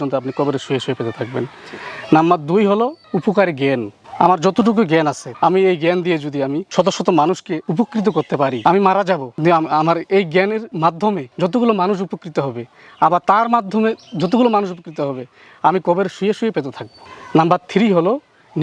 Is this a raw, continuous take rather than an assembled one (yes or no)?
yes